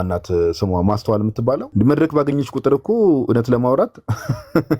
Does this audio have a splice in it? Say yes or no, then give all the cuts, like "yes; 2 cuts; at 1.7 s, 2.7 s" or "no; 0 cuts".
yes; 1 cut; at 1.7 s